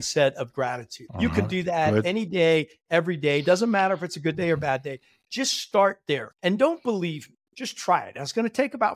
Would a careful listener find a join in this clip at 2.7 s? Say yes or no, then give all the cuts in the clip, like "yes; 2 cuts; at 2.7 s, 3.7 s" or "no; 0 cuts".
no; 2 cuts; at 1.0 s, 6.3 s